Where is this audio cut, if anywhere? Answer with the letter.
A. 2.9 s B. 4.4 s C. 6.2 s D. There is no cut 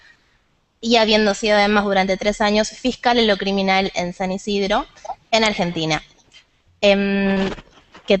A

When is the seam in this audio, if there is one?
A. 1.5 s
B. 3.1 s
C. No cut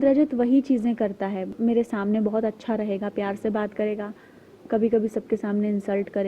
A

